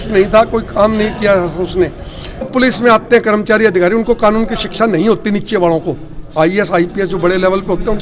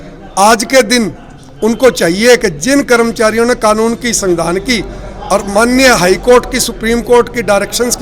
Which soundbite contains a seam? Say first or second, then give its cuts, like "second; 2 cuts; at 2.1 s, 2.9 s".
first; 1 cut; at 2.5 s